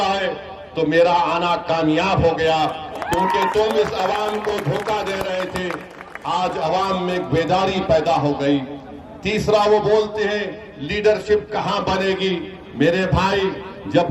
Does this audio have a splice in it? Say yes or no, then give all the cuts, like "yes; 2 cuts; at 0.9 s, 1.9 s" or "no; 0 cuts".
no; 0 cuts